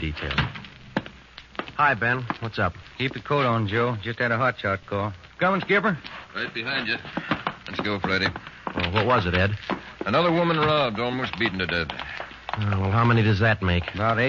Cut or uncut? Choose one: cut